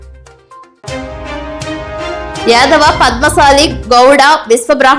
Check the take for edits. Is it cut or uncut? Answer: cut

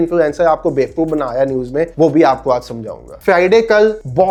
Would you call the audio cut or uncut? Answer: uncut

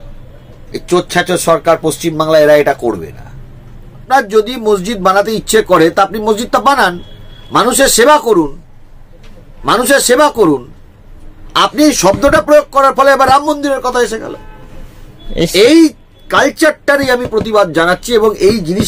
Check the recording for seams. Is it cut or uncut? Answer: cut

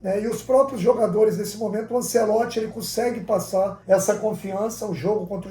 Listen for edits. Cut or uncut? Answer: cut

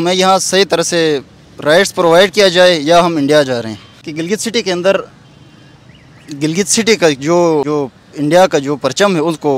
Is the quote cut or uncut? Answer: cut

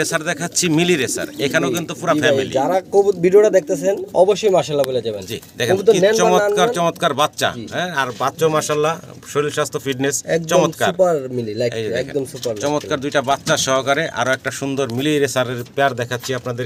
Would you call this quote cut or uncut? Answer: uncut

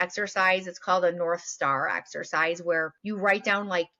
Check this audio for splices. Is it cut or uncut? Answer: cut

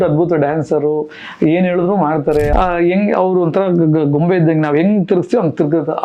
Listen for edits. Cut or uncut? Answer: cut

